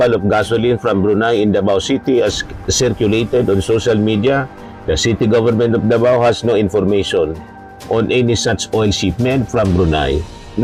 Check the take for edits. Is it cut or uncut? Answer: uncut